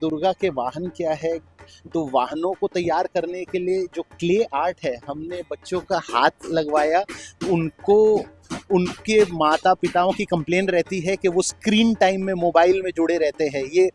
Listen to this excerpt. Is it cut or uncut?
uncut